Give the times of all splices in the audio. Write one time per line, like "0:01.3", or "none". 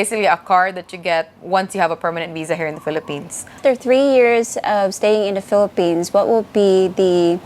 0:01.4
0:03.4